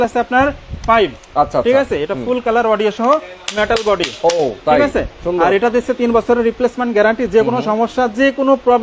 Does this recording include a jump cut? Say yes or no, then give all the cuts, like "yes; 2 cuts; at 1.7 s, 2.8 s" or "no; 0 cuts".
no; 0 cuts